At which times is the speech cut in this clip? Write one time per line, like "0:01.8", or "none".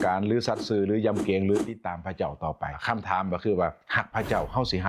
0:02.8